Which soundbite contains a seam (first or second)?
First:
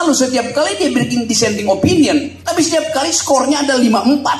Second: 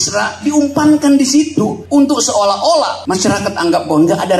second